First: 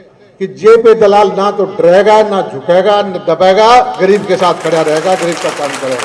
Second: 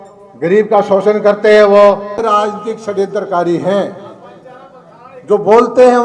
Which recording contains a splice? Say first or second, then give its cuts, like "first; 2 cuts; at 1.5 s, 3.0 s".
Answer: second; 1 cut; at 2.2 s